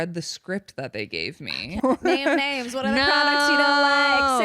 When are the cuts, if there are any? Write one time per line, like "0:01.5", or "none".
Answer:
0:01.8